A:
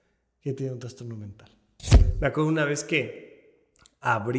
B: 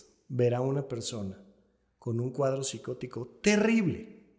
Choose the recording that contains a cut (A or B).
A